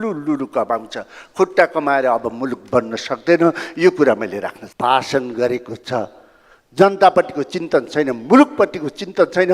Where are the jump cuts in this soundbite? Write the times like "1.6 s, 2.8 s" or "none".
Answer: 4.6 s